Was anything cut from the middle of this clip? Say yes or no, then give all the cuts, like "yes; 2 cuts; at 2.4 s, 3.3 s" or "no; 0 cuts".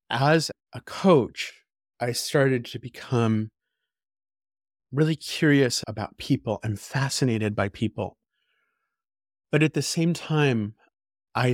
no; 0 cuts